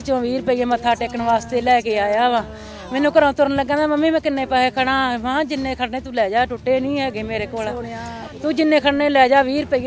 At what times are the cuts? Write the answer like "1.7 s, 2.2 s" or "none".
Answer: none